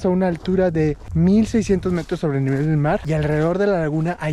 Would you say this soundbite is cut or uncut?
cut